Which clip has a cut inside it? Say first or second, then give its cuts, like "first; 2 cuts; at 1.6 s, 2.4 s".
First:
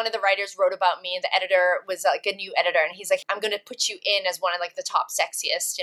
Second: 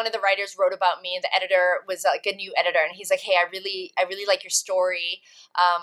first; 1 cut; at 3.2 s